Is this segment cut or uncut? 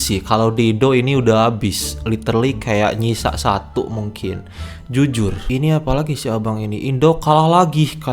cut